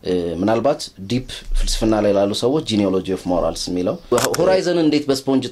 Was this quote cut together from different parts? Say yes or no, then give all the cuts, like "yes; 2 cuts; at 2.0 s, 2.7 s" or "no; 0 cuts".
yes; 1 cut; at 4.0 s